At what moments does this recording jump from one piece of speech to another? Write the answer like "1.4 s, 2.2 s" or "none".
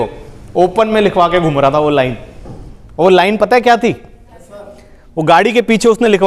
none